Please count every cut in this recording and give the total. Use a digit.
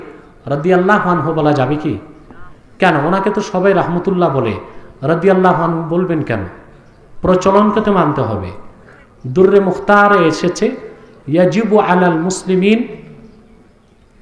0